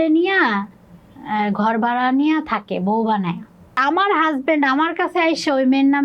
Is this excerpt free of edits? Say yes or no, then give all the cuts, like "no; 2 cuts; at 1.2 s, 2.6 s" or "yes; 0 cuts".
no; 1 cut; at 3.8 s